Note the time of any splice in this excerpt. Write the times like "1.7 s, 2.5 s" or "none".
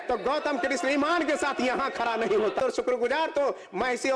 2.7 s